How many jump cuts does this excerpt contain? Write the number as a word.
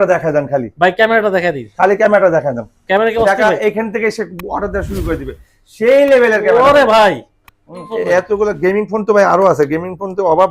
one